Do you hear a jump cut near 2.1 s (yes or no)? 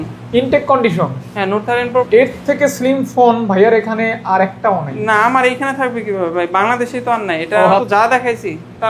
yes